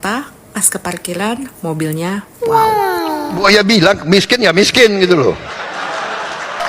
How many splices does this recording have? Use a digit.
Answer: 1